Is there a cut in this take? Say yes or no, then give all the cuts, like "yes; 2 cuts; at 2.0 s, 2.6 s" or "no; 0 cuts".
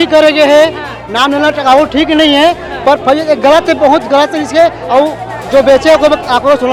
no; 0 cuts